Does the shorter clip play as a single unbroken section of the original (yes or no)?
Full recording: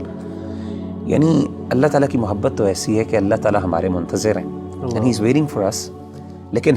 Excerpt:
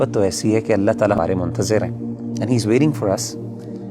no